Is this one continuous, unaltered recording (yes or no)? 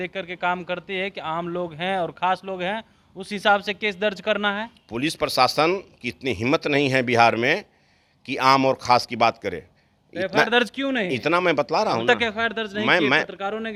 yes